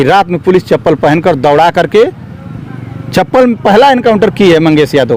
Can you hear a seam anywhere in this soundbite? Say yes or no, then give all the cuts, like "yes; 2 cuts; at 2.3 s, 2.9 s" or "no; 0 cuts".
no; 0 cuts